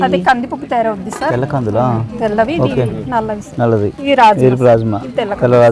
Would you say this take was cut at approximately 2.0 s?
no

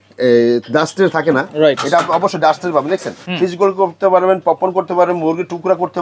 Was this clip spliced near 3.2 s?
yes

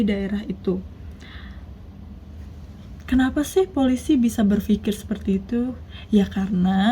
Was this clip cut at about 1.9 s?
yes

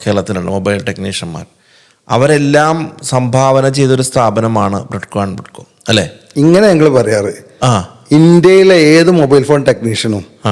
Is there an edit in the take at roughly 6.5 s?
no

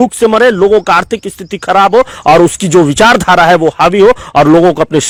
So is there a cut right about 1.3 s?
no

